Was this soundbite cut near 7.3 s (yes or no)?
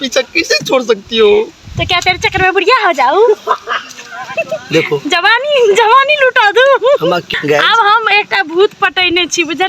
yes